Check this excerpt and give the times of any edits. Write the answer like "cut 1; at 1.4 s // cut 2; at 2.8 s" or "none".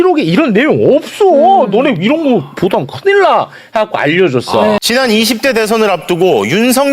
cut 1; at 4.8 s